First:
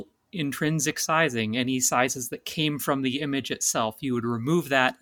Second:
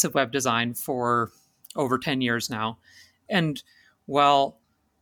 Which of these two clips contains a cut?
second; 1 cut; at 3.2 s

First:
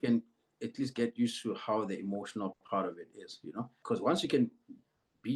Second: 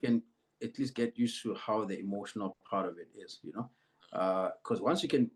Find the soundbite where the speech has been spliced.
first; 1 cut; at 3.8 s

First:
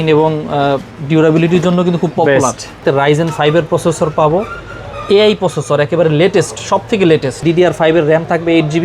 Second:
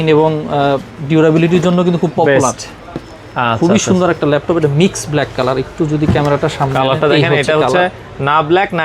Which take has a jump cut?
first; 2 cuts; at 2.8 s, 7.4 s

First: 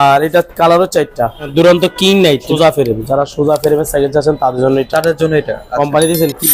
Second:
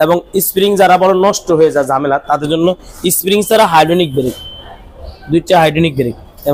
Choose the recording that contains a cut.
first; 2 cuts; at 1.4 s, 2.5 s

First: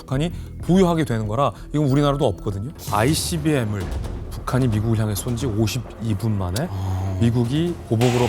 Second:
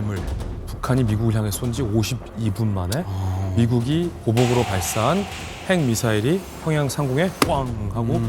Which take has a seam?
first; 1 cut; at 2.7 s

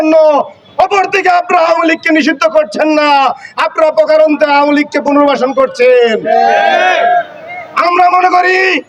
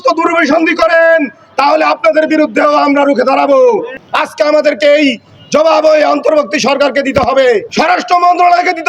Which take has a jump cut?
second; 2 cuts; at 3.9 s, 7.7 s

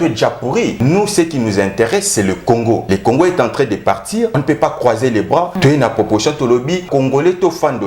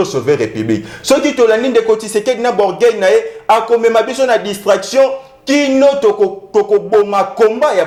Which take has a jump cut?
first; 5 cuts; at 0.8 s, 2.8 s, 4.4 s, 5.5 s, 6.9 s

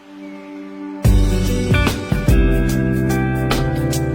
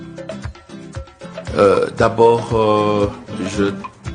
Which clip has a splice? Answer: first; 1 cut; at 1.2 s

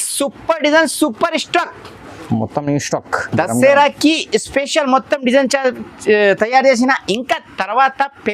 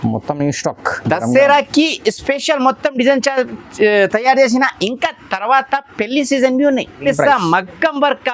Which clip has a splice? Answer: second; 1 cut; at 7.0 s

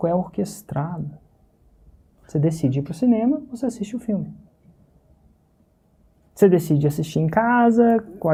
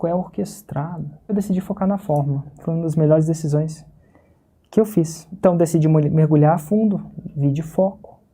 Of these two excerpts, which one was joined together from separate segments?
second; 2 cuts; at 1.3 s, 5.2 s

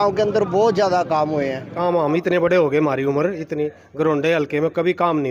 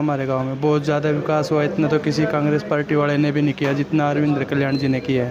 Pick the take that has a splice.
first; 1 cut; at 1.8 s

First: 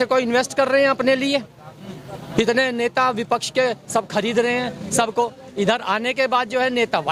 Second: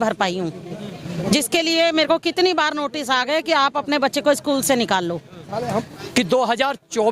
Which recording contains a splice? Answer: second; 1 cut; at 5.9 s

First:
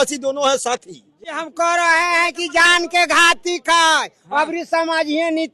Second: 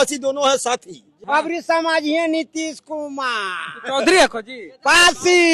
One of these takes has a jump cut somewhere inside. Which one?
second; 1 cut; at 1.1 s

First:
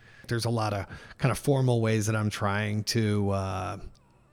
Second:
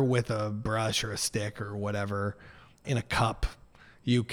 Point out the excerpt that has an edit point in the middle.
second; 1 cut; at 2.8 s

